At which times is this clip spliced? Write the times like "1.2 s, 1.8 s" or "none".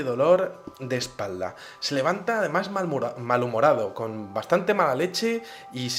none